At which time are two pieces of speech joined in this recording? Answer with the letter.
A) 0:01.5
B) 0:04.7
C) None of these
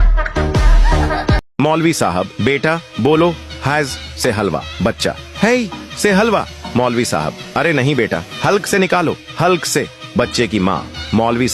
A